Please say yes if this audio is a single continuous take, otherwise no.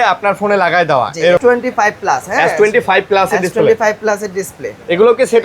no